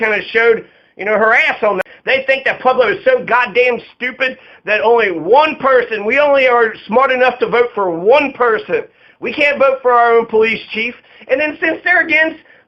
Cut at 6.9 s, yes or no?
no